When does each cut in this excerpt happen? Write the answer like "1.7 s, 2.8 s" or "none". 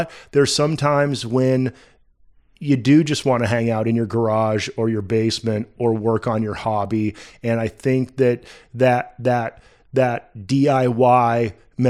none